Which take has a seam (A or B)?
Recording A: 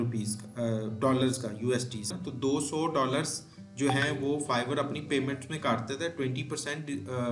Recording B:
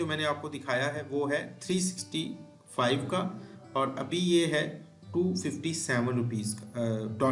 A